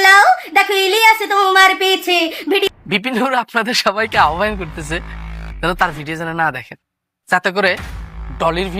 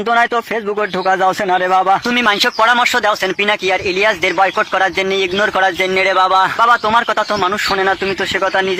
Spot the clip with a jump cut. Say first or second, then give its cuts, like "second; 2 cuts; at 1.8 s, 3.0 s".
first; 1 cut; at 2.7 s